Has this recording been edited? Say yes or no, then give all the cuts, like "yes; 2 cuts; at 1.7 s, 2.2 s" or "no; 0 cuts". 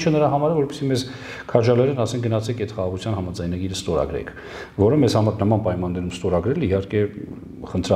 no; 0 cuts